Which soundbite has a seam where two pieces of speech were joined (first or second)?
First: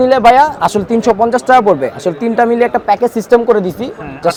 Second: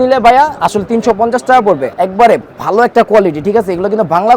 second